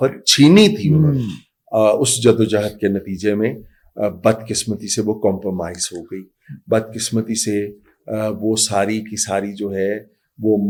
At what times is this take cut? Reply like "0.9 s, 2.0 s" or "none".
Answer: none